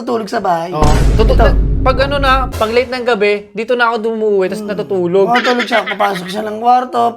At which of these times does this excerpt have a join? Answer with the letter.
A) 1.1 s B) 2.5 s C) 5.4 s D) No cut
B